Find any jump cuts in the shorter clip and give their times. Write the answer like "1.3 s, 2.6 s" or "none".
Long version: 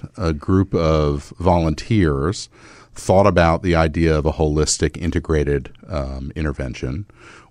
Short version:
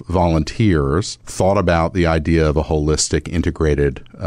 1.2 s